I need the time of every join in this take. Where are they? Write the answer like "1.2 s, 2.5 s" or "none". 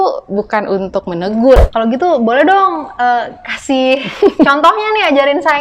1.6 s